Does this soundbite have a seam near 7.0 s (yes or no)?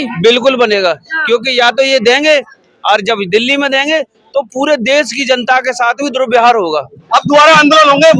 yes